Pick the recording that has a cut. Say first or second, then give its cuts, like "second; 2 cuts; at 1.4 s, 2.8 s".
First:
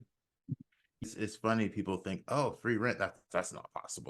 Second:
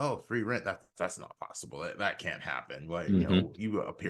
first; 1 cut; at 1.0 s